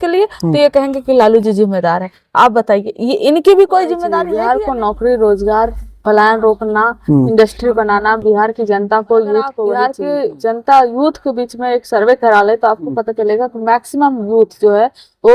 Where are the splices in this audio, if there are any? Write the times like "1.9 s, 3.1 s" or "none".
4.3 s, 9.9 s